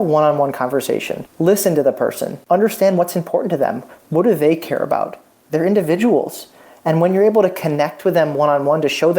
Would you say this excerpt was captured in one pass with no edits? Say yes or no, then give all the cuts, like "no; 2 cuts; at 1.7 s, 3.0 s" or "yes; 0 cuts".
no; 2 cuts; at 1.2 s, 2.3 s